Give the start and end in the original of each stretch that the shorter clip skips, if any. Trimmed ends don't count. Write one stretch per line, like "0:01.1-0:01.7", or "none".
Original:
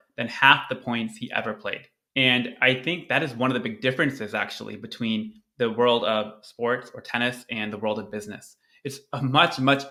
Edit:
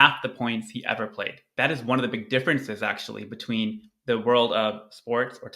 0:02.0-0:03.0